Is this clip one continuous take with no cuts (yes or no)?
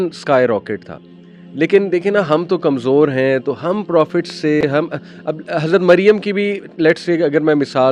yes